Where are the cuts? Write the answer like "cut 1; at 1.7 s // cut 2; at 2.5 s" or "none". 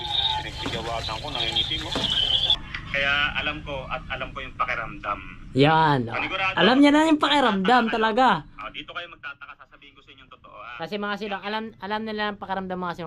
cut 1; at 2.6 s